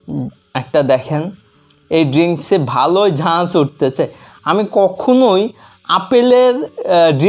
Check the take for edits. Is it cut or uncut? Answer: uncut